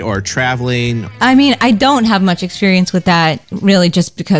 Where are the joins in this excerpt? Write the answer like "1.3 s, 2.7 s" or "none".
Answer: 1.1 s

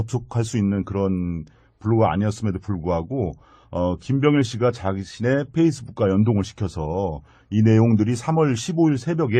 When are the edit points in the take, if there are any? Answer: 6.6 s

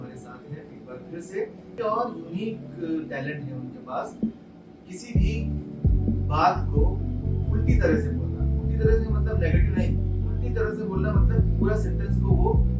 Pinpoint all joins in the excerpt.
1.7 s

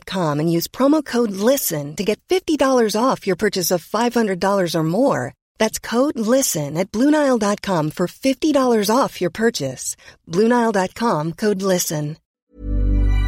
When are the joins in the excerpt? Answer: 12.3 s

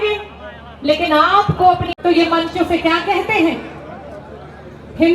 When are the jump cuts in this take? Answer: 1.9 s

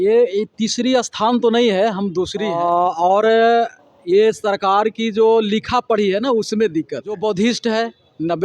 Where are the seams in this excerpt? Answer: none

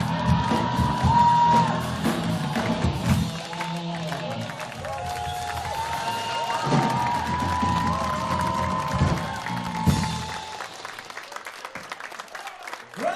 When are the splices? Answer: 4.2 s

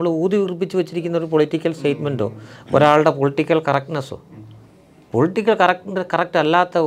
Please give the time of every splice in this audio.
none

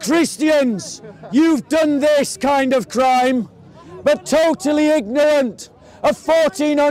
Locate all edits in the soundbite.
none

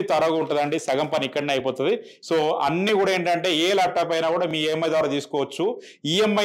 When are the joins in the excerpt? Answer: 2.1 s

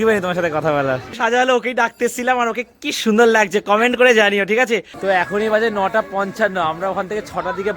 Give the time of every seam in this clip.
1.2 s, 4.9 s

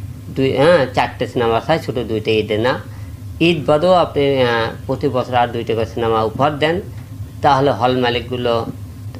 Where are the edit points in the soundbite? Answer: none

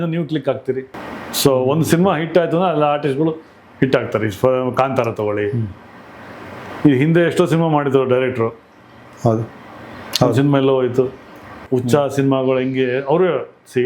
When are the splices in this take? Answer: 1.0 s, 11.6 s

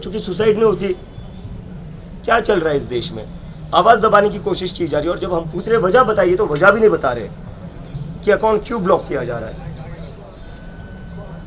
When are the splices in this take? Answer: none

